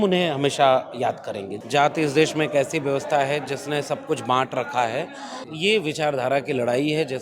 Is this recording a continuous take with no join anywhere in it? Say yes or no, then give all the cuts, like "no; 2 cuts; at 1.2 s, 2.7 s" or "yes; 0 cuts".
no; 2 cuts; at 1.5 s, 5.4 s